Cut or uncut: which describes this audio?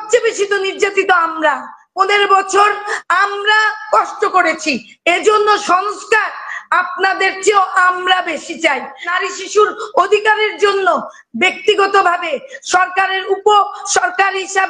cut